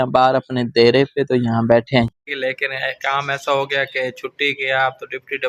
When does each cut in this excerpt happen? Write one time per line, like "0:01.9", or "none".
0:02.1